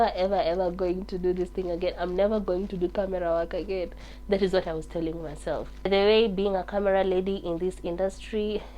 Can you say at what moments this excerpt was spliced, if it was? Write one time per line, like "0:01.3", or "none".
0:05.9